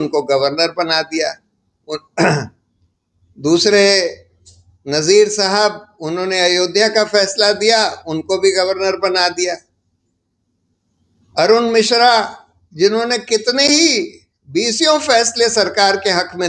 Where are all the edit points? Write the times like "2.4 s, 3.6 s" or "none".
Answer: none